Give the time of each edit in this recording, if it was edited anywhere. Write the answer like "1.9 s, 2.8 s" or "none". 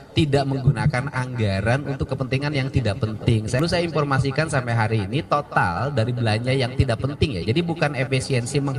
3.6 s